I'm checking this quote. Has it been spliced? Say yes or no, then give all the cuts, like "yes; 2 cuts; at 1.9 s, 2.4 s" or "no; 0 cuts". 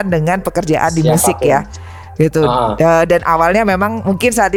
no; 0 cuts